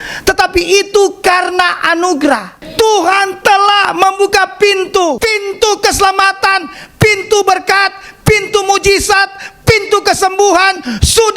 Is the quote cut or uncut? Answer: cut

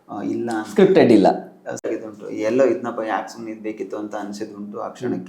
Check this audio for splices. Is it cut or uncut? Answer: cut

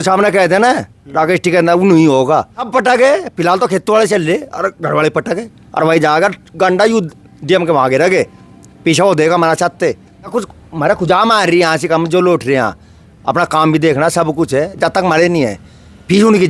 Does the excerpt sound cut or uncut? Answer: cut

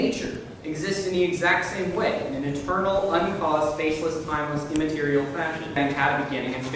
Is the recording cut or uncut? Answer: cut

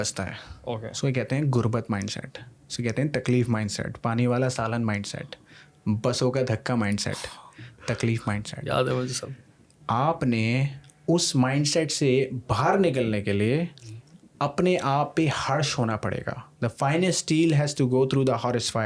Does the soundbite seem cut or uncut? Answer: uncut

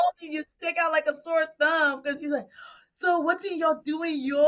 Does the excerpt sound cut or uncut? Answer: uncut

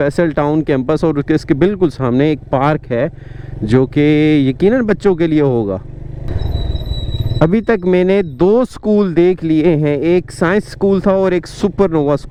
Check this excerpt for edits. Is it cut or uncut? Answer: uncut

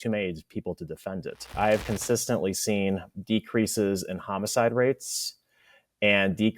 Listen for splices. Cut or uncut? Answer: cut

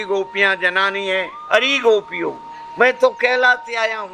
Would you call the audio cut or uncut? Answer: cut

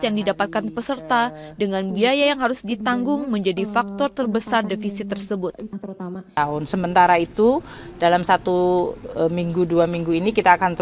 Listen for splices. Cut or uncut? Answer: cut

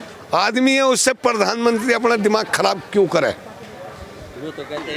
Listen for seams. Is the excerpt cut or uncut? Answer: uncut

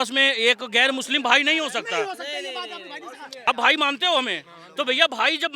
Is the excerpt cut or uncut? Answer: cut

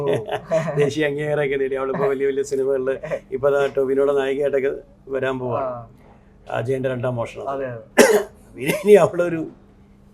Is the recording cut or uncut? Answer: uncut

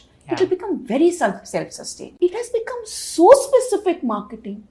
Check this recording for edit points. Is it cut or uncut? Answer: cut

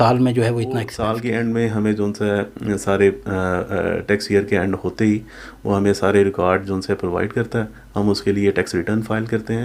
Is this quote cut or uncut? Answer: cut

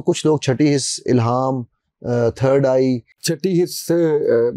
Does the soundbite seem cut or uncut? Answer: cut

